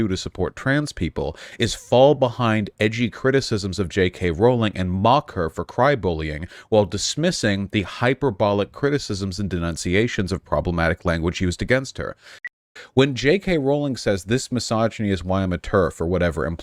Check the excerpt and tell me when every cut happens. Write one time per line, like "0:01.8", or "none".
0:12.6